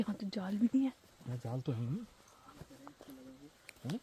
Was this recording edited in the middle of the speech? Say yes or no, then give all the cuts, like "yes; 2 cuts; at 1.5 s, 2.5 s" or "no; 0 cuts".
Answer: no; 0 cuts